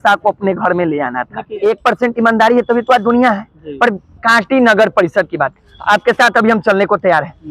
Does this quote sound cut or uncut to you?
cut